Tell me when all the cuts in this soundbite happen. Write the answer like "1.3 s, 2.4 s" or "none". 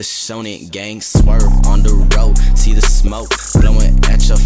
none